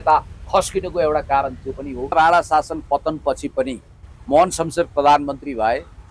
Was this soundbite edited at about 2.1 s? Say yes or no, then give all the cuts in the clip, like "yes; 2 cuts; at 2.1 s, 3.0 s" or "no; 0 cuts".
yes; 1 cut; at 2.1 s